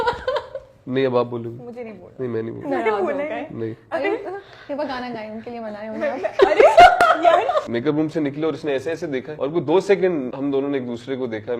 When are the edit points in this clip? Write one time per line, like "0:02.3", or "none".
0:07.7
0:09.3
0:10.3